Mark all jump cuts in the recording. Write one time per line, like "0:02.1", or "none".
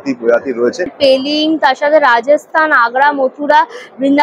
0:00.9